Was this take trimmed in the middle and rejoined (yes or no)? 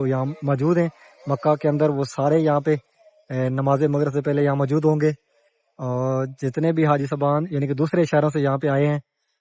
no